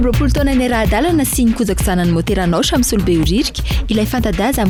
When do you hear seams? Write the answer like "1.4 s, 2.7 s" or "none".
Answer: none